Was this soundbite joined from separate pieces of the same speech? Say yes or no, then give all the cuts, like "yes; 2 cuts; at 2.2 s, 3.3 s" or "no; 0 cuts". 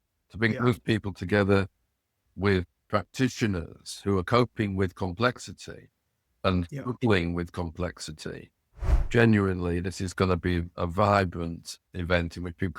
yes; 3 cuts; at 2.3 s, 9.0 s, 11.9 s